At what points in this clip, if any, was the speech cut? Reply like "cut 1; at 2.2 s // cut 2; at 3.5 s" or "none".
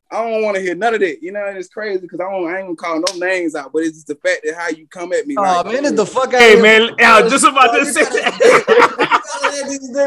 none